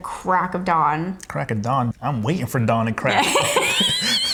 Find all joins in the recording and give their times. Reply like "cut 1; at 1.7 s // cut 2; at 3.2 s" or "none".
none